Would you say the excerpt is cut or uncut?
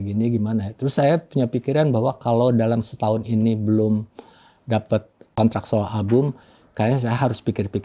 cut